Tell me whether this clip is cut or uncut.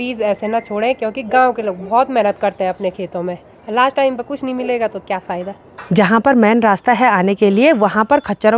uncut